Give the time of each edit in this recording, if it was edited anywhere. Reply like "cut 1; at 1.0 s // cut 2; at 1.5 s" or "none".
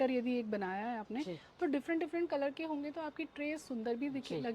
none